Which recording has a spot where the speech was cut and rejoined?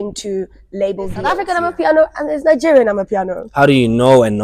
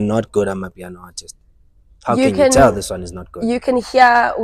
first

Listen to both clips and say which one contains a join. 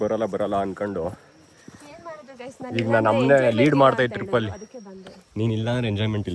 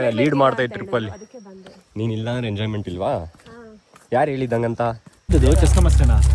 second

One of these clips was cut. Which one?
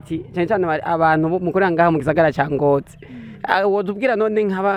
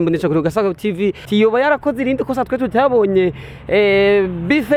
second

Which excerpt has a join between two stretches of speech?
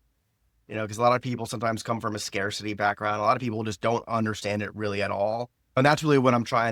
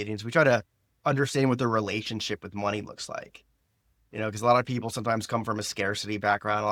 first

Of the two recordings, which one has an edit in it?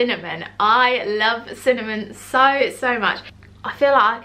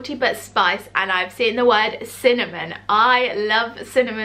first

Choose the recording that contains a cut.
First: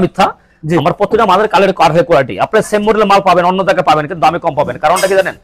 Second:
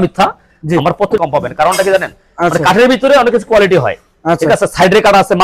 second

